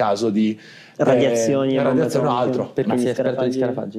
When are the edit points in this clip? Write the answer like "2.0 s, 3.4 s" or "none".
2.9 s